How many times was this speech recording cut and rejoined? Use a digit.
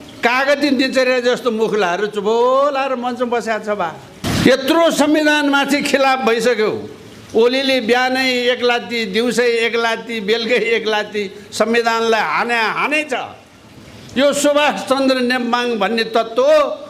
1